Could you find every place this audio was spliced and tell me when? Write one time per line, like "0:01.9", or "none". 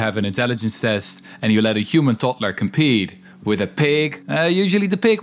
0:04.2